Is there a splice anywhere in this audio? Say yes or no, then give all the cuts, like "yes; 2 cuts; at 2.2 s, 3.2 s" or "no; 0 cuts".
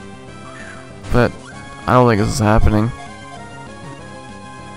yes; 1 cut; at 2.9 s